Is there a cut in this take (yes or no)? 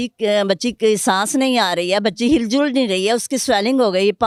no